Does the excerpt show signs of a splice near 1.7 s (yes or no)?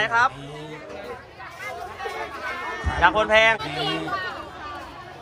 no